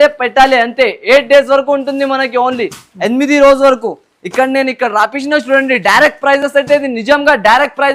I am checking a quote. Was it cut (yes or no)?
no